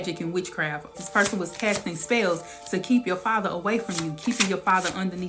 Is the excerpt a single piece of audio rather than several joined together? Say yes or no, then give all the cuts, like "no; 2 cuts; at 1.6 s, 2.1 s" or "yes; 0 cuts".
no; 1 cut; at 1.0 s